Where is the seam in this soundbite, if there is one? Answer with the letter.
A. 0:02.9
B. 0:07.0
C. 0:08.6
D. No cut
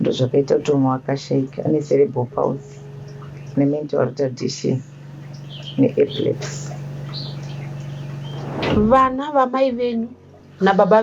C